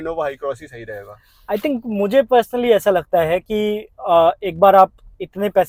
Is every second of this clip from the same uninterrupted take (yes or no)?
yes